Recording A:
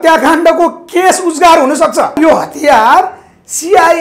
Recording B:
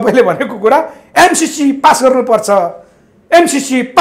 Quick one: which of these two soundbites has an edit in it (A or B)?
A